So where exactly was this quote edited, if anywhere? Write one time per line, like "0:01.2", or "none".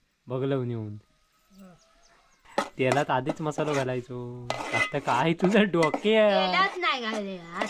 0:02.4